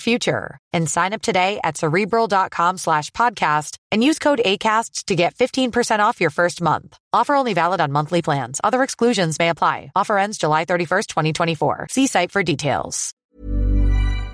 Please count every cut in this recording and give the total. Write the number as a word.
one